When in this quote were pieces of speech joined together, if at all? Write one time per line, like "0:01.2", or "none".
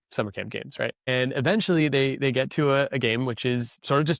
0:01.1